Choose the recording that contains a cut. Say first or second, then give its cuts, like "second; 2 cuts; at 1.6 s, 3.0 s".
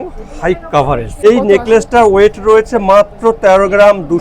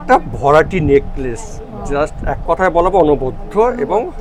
first; 1 cut; at 1.2 s